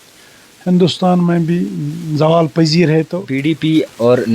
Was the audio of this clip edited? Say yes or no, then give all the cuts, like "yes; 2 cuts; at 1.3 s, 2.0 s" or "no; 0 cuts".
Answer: yes; 1 cut; at 3.2 s